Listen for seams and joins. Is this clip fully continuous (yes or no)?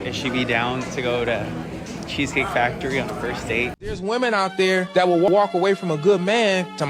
no